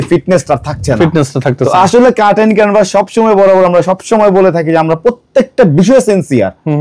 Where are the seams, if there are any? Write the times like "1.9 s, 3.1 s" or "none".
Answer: none